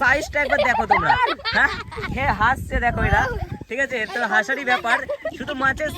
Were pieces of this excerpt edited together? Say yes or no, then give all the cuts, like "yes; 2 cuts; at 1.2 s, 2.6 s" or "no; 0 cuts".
no; 0 cuts